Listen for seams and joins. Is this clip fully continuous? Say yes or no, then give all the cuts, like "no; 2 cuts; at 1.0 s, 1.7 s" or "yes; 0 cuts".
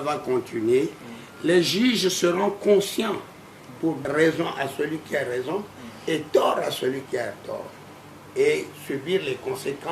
no; 1 cut; at 4.0 s